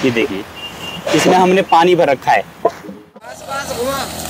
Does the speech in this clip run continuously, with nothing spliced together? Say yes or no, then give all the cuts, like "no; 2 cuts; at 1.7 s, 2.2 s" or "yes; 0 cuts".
no; 1 cut; at 3.1 s